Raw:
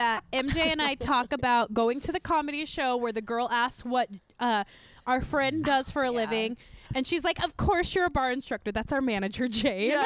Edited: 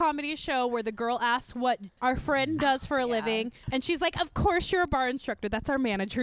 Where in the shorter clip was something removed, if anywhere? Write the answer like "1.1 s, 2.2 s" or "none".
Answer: 1.9 s, 3.6 s